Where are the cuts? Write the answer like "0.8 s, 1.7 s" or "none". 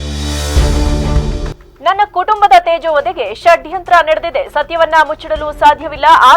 1.5 s